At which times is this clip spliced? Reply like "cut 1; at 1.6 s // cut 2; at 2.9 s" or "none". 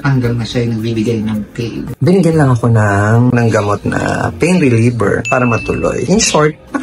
cut 1; at 1.9 s // cut 2; at 6.0 s